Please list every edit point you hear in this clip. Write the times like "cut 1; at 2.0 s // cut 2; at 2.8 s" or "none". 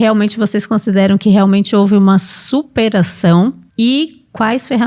cut 1; at 3.6 s